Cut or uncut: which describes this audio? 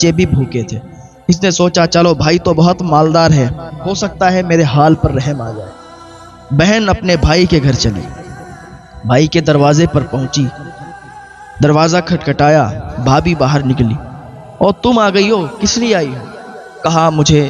uncut